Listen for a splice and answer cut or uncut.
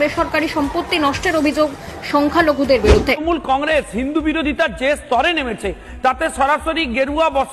cut